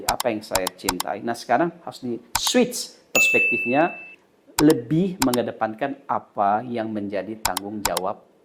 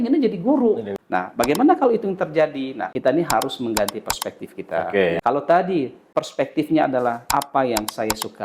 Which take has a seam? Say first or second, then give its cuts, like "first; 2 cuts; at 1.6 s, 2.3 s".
second; 5 cuts; at 0.9 s, 2.8 s, 5.2 s, 6.0 s, 7.2 s